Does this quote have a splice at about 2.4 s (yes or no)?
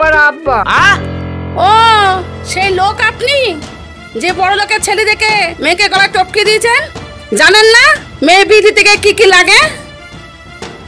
no